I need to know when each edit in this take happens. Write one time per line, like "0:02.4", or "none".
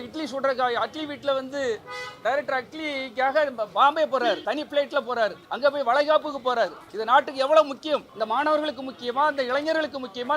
0:04.4
0:05.4
0:06.9
0:08.1